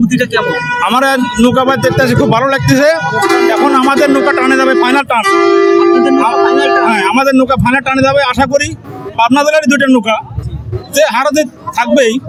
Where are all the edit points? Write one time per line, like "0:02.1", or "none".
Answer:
none